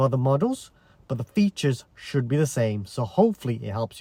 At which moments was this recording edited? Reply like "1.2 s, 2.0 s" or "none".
none